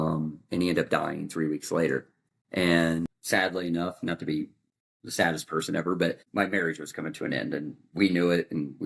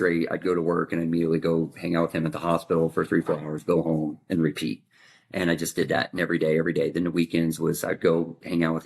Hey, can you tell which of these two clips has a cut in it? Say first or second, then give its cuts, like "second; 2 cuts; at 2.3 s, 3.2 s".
first; 2 cuts; at 3.2 s, 6.2 s